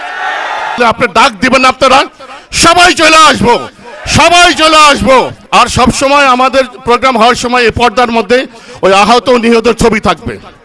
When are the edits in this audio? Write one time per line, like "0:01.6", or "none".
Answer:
0:00.8
0:05.4

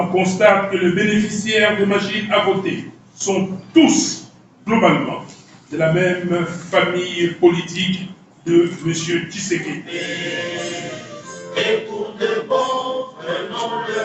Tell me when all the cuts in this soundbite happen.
0:10.0

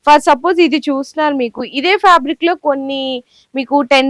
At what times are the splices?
none

